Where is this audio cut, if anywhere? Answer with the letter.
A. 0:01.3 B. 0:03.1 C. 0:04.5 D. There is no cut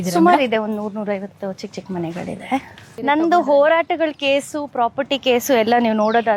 B